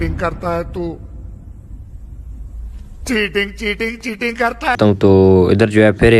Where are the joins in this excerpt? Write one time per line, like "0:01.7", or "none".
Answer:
0:04.8